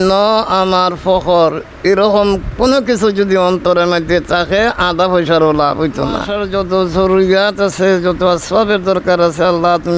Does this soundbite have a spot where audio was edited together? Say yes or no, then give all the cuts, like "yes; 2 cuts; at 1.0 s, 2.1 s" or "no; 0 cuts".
yes; 1 cut; at 6.3 s